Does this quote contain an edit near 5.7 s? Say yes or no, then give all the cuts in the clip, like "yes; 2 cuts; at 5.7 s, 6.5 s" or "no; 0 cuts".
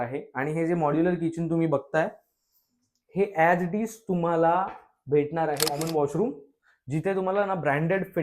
yes; 1 cut; at 5.7 s